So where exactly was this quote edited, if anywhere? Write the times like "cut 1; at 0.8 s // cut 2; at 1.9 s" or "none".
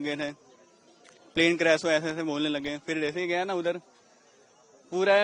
none